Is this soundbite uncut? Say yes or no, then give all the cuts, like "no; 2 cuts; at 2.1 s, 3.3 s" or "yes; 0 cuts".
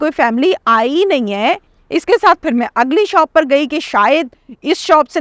no; 1 cut; at 1.7 s